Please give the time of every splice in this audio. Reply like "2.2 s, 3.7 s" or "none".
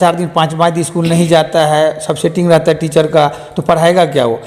none